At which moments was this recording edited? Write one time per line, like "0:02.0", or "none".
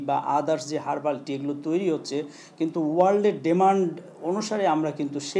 none